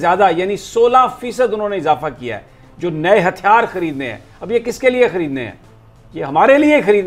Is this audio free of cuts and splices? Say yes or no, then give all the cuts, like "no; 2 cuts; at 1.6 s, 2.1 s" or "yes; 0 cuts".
yes; 0 cuts